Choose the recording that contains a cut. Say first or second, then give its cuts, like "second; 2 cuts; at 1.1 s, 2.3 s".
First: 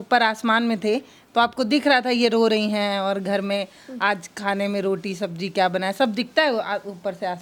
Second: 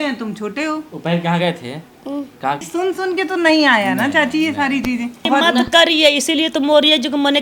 second; 2 cuts; at 2.7 s, 5.2 s